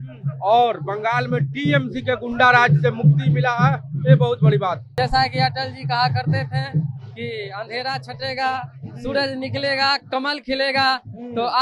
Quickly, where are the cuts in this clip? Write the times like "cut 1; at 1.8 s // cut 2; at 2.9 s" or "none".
cut 1; at 4.9 s